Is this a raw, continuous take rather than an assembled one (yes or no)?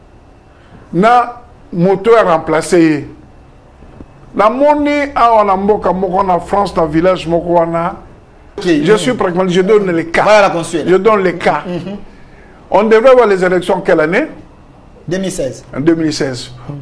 no